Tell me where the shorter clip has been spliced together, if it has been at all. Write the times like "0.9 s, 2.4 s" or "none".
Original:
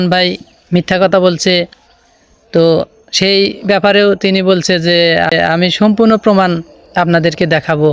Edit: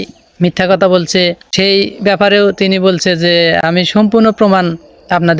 1.4 s, 3.6 s

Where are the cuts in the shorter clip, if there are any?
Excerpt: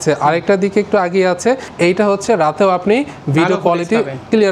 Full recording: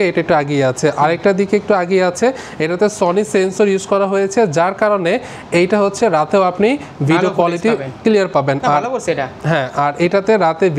1.7 s

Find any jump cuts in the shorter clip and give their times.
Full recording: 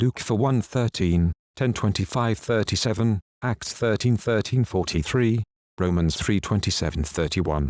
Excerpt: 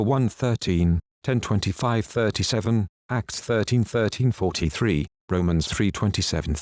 4.8 s

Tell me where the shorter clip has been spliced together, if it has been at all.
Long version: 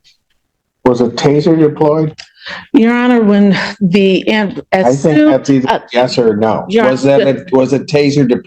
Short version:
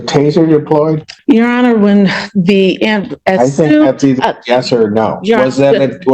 1.1 s

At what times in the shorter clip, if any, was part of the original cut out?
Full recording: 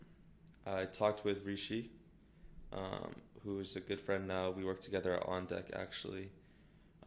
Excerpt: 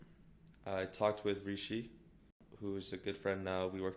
2.4 s

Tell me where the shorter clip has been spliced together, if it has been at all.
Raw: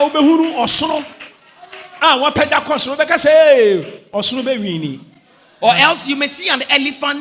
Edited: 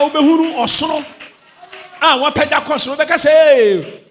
none

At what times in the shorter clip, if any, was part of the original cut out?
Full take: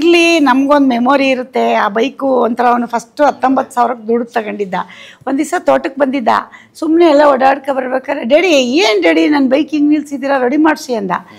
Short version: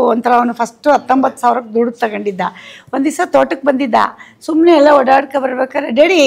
none

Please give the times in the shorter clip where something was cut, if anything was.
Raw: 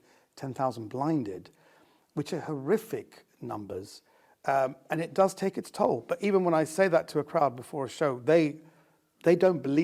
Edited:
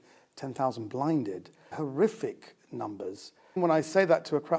1.7 s, 3.6 s

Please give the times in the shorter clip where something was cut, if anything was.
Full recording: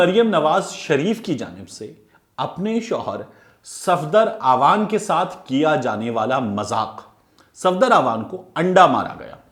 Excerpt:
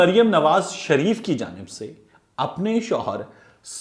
none

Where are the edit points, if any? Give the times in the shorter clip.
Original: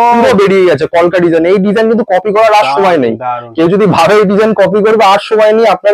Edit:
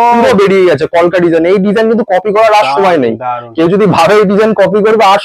none

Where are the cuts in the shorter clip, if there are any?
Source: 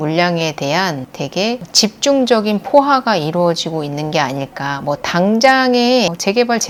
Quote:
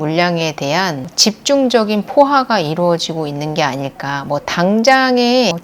1.1 s

